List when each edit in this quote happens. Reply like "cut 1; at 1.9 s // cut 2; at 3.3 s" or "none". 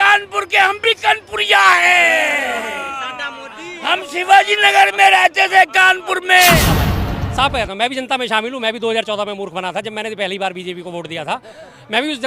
cut 1; at 6.7 s